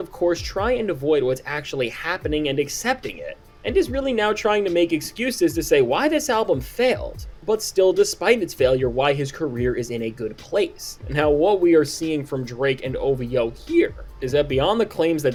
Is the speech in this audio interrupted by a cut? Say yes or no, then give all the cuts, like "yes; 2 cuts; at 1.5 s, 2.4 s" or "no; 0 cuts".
no; 0 cuts